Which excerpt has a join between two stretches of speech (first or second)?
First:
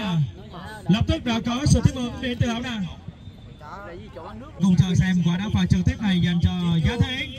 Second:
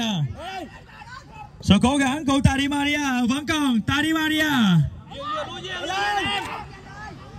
first